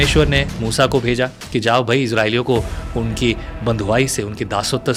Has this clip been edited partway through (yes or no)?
no